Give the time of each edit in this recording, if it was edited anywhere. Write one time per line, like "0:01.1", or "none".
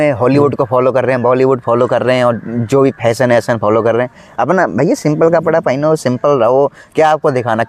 none